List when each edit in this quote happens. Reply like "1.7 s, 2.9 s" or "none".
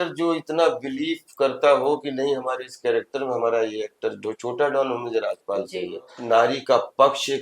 6.1 s